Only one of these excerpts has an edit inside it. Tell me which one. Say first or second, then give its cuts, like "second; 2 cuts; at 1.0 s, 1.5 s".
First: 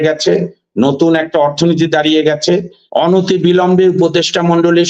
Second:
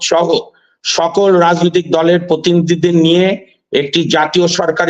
first; 1 cut; at 2.8 s